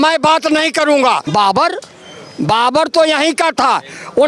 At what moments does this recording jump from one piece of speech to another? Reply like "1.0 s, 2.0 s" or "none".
1.2 s